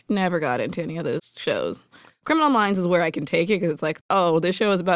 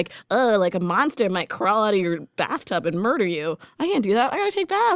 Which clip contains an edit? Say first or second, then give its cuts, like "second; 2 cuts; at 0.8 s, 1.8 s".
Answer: first; 3 cuts; at 1.3 s, 2.2 s, 4.0 s